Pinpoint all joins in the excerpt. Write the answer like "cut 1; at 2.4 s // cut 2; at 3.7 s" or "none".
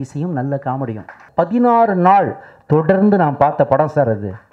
cut 1; at 1.2 s